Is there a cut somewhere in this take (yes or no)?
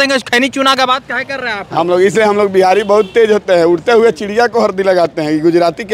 no